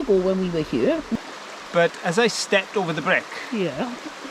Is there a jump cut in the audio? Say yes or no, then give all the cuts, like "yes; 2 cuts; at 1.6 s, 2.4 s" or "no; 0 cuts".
yes; 1 cut; at 1.1 s